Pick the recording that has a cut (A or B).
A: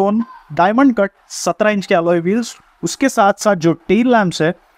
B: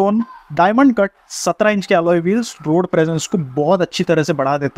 A